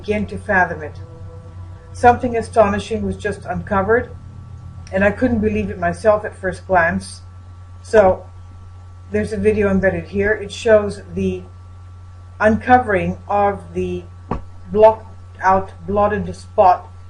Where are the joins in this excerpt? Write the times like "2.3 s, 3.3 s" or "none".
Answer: 6.3 s